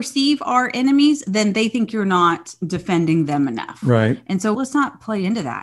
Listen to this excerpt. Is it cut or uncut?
cut